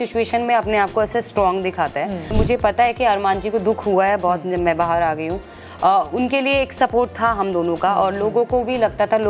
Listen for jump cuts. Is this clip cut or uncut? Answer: cut